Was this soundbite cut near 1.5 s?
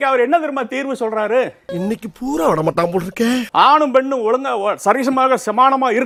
no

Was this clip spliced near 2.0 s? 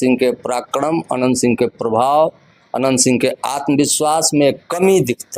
no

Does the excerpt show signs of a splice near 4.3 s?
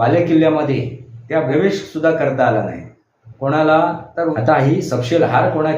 yes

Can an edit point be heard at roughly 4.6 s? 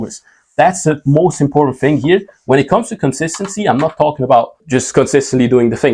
yes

